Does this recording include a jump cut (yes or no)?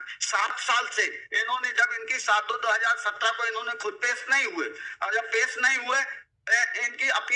no